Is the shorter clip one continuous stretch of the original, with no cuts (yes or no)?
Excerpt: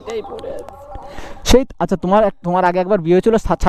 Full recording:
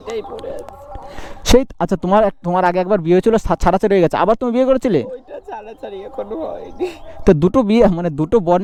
yes